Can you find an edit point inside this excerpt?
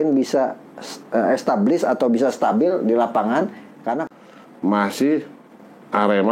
yes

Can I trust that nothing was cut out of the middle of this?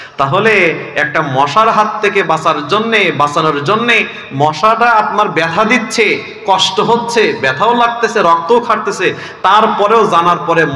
yes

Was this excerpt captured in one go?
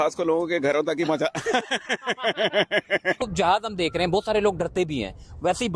no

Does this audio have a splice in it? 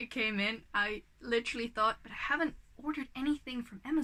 no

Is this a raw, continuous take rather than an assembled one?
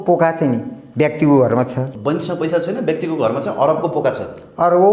no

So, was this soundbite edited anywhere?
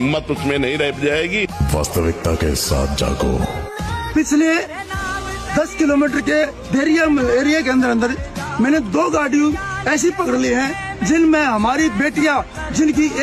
no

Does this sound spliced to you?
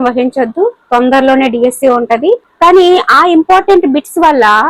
yes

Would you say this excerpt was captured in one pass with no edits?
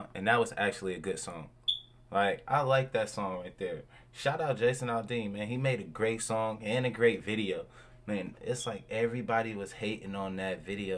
yes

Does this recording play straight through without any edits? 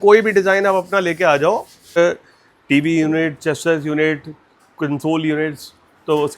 no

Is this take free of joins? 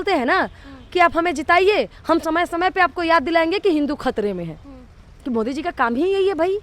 yes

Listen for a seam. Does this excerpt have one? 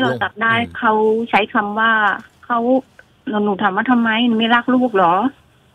no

